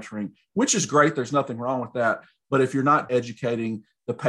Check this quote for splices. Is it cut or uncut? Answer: cut